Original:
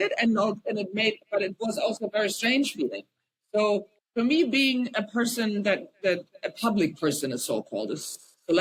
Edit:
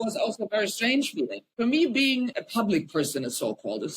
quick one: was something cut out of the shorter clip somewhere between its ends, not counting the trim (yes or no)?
yes